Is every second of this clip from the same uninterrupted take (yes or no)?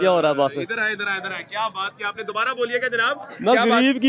yes